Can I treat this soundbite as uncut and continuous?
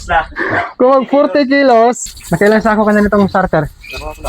no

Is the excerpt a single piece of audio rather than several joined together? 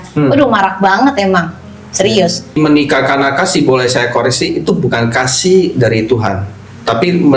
no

